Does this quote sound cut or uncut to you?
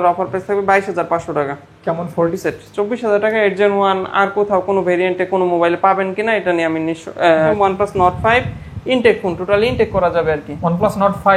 cut